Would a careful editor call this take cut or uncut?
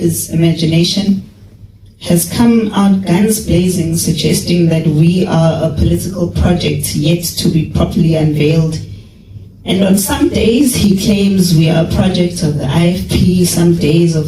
uncut